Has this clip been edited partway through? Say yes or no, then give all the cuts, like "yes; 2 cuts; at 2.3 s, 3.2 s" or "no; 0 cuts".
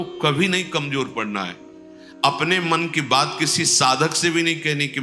no; 0 cuts